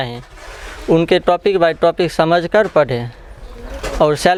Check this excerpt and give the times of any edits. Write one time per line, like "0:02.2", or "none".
none